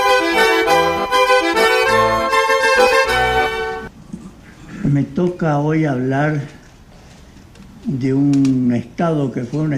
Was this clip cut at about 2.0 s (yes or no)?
yes